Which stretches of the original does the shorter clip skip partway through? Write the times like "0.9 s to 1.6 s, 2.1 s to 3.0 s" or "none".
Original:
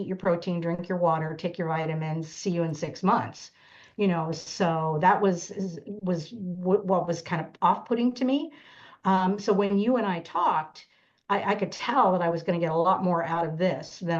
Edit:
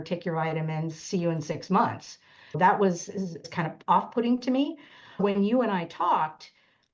3.9 s to 5.0 s, 5.9 s to 7.2 s, 8.9 s to 9.6 s